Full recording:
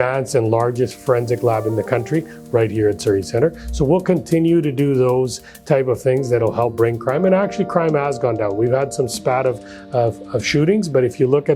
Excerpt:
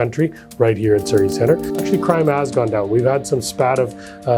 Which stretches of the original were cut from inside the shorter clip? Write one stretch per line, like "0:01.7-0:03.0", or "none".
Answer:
0:03.7-0:07.5